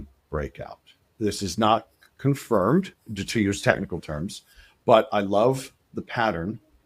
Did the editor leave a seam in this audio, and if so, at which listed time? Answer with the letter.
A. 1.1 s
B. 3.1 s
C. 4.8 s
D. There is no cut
A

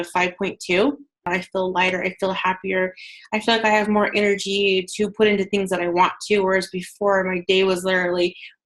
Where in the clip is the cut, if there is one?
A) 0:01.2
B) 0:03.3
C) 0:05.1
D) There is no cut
A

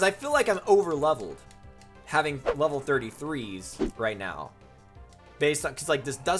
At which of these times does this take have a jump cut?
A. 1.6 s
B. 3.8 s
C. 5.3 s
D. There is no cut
B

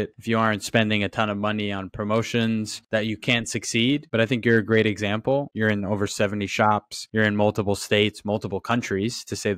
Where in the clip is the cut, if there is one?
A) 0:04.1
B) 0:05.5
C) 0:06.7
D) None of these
B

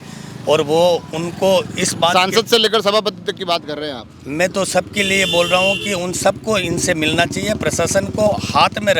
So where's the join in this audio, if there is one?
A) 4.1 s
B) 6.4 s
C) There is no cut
C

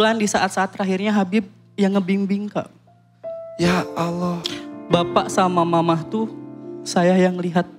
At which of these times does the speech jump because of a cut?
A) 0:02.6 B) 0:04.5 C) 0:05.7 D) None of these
B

